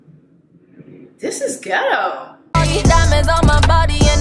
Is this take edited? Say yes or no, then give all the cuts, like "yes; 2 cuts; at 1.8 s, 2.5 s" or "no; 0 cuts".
yes; 1 cut; at 2.3 s